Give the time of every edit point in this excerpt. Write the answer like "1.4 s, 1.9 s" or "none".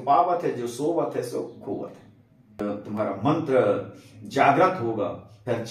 2.6 s